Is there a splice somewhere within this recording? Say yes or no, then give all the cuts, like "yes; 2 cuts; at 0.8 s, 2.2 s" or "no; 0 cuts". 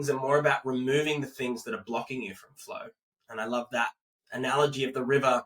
no; 0 cuts